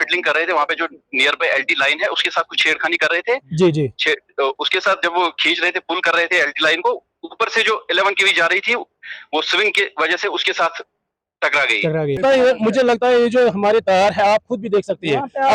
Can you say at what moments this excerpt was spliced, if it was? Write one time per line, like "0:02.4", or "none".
0:12.2